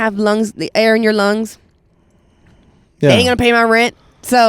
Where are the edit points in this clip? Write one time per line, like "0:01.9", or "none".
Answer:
none

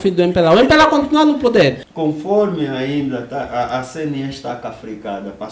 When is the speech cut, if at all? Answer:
0:01.9

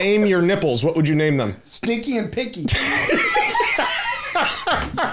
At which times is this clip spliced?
none

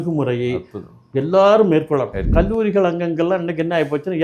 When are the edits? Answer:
0:02.3

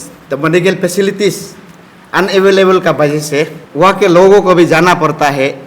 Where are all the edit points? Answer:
0:03.6

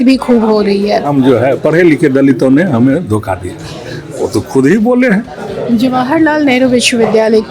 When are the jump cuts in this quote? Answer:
0:01.1
0:05.4

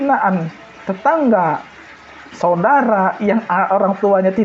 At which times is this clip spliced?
none

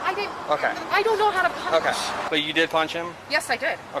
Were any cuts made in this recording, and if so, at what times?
0:02.2

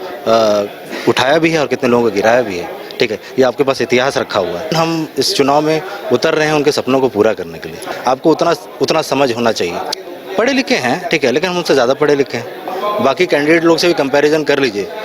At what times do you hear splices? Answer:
0:04.7
0:07.9
0:10.0
0:12.7

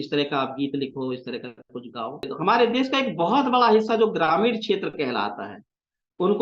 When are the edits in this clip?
0:02.3

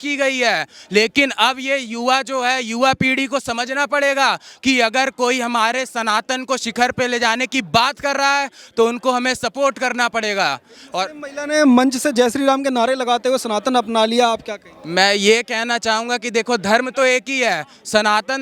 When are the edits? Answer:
none

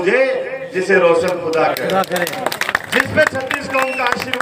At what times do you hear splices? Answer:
none

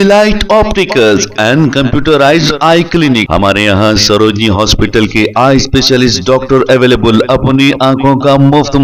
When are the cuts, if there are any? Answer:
none

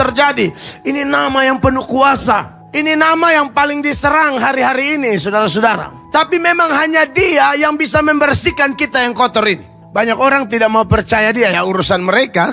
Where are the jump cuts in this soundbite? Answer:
0:02.6
0:05.9
0:09.7

